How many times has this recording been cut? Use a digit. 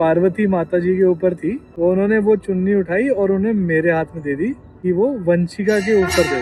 2